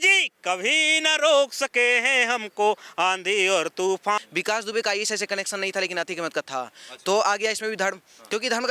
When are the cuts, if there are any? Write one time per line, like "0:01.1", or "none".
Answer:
0:04.2